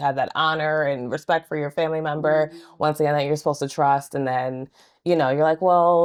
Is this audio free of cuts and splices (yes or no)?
yes